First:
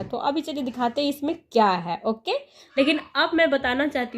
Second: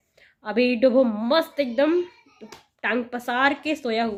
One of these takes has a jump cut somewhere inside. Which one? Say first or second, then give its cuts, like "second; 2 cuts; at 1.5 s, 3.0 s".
first; 1 cut; at 2.6 s